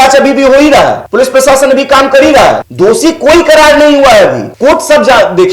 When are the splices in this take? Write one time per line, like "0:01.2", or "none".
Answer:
0:01.0
0:02.7
0:04.5